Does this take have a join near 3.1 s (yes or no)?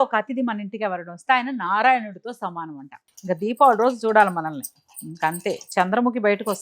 yes